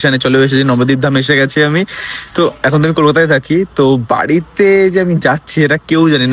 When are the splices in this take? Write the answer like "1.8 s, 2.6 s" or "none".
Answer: none

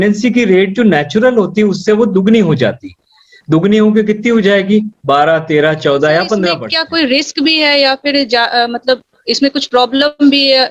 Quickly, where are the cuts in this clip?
6.7 s

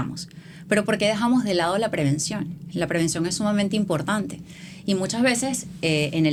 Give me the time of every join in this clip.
none

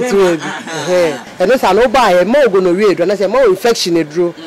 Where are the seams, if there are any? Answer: 1.2 s

